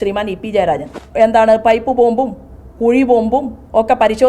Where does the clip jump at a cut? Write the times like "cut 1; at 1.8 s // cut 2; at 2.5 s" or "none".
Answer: cut 1; at 1.0 s